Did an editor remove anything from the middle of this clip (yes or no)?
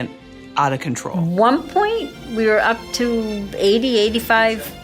yes